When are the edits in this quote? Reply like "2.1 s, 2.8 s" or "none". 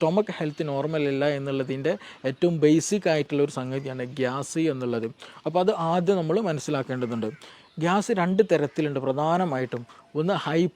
7.5 s